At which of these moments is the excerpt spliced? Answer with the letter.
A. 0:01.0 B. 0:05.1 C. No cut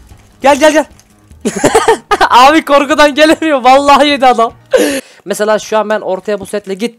B